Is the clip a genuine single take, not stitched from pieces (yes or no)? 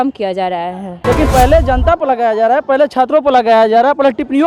no